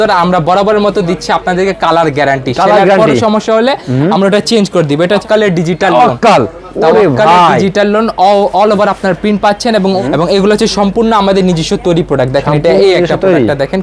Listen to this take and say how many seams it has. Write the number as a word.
two